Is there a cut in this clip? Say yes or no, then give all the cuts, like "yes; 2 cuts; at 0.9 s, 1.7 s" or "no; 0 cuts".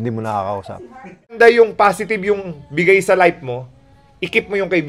yes; 1 cut; at 1.3 s